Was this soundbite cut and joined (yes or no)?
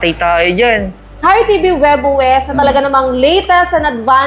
yes